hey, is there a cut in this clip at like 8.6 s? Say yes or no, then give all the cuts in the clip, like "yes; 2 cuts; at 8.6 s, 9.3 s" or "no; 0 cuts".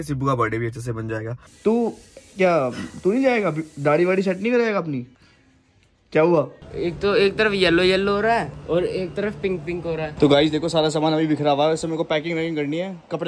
no; 3 cuts; at 1.4 s, 6.6 s, 10.1 s